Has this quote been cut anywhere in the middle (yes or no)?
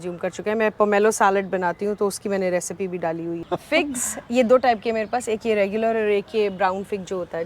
yes